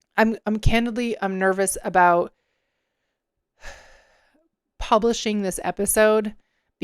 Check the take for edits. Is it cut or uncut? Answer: uncut